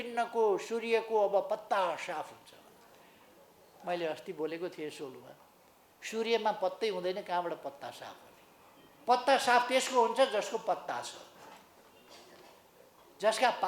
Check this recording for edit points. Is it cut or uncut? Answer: uncut